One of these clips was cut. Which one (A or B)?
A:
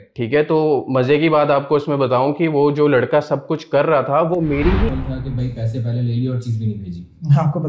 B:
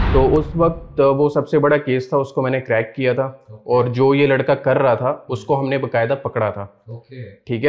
A